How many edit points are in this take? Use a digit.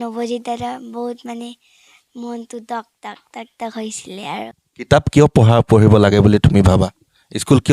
1